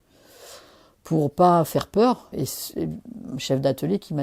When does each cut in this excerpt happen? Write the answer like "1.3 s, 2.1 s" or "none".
2.3 s

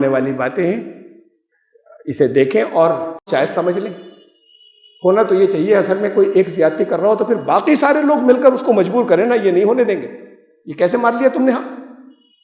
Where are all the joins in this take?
3.2 s

